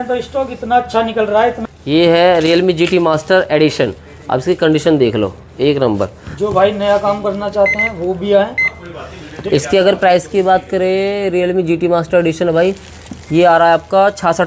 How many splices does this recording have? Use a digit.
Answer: 1